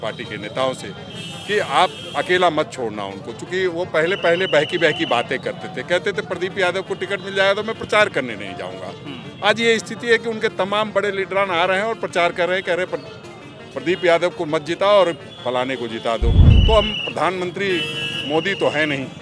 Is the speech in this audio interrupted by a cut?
yes; 1 cut; at 16.5 s

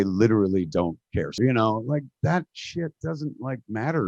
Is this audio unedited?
no; 1 cut; at 1.3 s

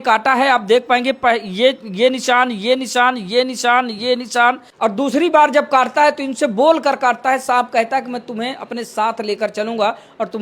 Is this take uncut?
no; 1 cut; at 4.7 s

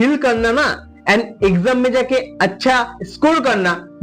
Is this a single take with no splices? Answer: yes; 0 cuts

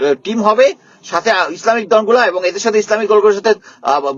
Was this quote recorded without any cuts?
yes; 0 cuts

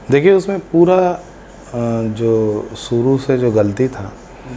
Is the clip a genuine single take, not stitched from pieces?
yes; 0 cuts

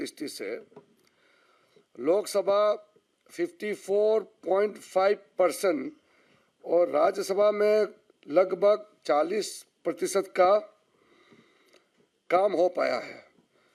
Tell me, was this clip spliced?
no; 0 cuts

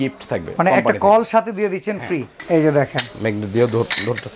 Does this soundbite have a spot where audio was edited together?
yes; 1 cut; at 2.3 s

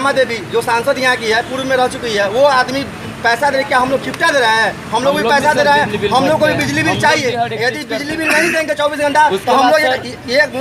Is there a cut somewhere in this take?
no; 0 cuts

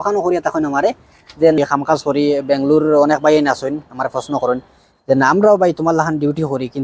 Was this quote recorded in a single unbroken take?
no; 1 cut; at 1.6 s

